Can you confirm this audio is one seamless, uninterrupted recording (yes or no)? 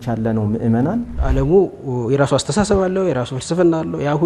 no